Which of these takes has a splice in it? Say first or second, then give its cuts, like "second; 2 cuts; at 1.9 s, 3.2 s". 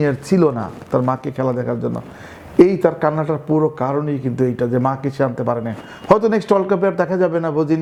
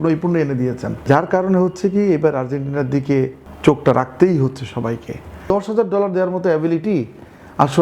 second; 3 cuts; at 1.0 s, 3.4 s, 5.5 s